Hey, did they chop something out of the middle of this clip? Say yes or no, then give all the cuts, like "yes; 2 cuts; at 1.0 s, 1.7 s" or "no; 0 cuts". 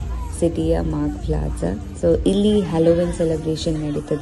no; 0 cuts